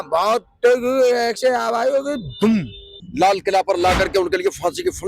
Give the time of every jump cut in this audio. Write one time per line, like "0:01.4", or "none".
0:03.0